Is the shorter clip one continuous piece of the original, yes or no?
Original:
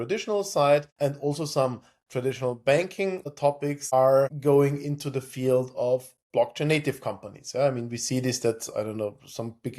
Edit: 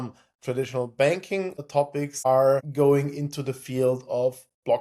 yes